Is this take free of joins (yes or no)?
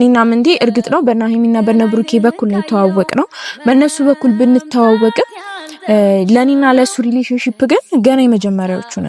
yes